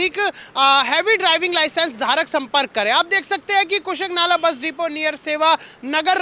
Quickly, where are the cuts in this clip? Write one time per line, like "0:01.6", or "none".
none